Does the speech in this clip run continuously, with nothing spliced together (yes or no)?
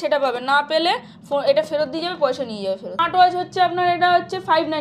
no